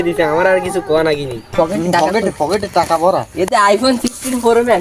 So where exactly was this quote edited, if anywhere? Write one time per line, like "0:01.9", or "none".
0:01.5